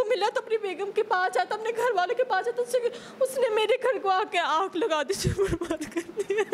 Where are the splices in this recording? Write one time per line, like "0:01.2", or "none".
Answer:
none

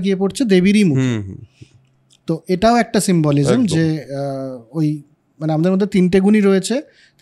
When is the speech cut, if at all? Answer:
none

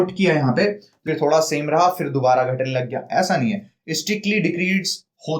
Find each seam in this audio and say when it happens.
0:00.9

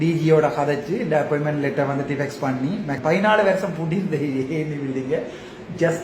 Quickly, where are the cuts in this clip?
0:03.0

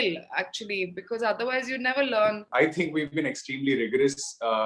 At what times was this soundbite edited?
0:02.5

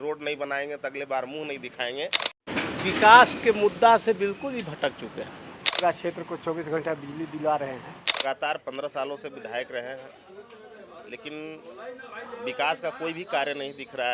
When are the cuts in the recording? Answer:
0:02.5
0:05.8
0:08.2

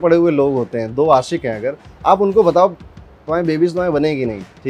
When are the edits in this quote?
none

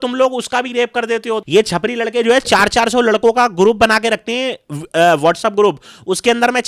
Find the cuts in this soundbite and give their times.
0:01.4

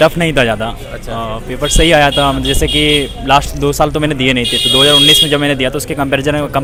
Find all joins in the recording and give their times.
none

